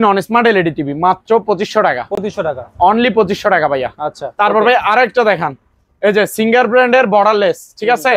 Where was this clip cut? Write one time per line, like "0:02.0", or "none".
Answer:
none

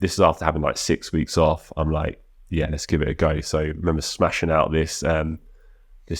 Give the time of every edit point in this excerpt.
none

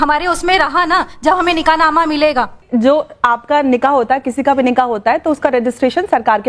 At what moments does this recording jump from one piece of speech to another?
0:02.6

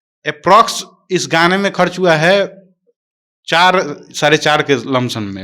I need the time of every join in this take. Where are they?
none

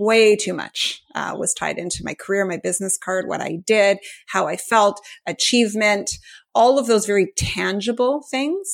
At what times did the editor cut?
none

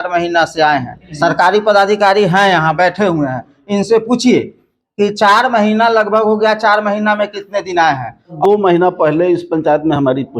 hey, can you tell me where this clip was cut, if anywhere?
0:01.0
0:08.4

